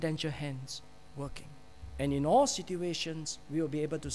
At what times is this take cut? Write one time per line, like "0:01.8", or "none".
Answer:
0:01.9